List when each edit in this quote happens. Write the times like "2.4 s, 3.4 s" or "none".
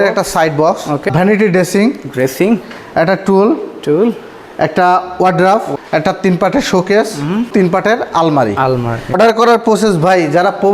1.0 s, 5.7 s, 7.5 s, 9.2 s